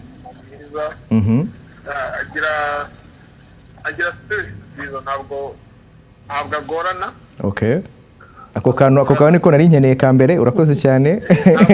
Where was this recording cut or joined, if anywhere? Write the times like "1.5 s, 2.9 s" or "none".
none